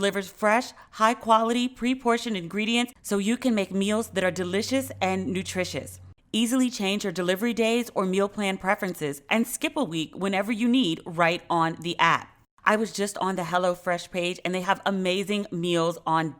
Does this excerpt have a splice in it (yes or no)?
yes